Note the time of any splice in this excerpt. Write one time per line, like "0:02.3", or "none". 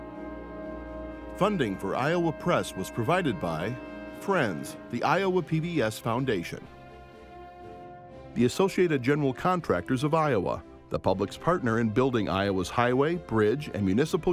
0:01.4
0:06.7
0:08.3